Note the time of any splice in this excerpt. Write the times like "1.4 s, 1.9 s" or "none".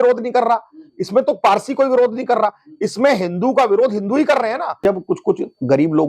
4.8 s